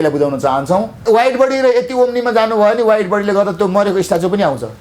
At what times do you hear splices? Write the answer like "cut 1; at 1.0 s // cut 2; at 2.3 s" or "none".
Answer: cut 1; at 1.0 s